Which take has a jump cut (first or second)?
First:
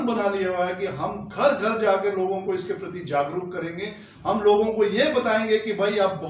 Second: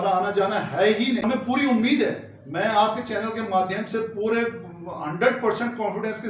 second